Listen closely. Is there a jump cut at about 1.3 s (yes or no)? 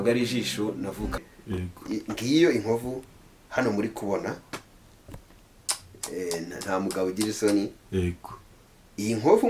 yes